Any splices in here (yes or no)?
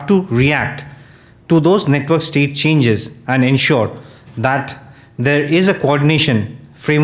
no